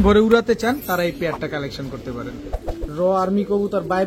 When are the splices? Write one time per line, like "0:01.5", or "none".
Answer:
0:02.4